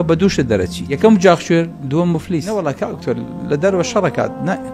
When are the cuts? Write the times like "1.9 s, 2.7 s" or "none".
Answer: 0.9 s, 2.5 s